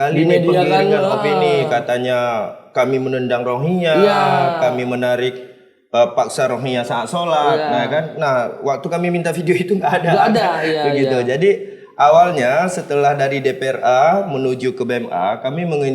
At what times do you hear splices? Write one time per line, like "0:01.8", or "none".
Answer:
none